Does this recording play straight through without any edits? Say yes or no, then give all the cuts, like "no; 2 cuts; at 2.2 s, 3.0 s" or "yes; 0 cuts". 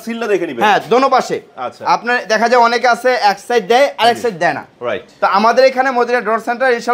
yes; 0 cuts